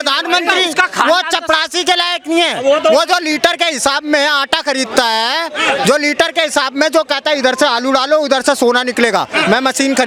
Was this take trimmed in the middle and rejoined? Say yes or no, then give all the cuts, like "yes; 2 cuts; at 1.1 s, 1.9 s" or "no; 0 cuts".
no; 0 cuts